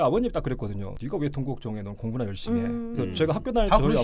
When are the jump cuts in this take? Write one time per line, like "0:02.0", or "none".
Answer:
0:00.9